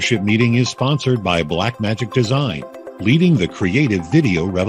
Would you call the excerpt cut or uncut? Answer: uncut